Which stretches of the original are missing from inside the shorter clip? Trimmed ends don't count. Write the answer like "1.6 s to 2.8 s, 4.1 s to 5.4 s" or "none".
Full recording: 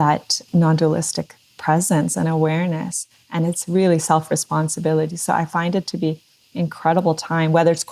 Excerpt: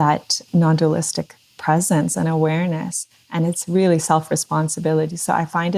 none